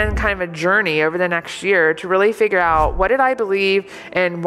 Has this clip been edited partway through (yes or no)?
no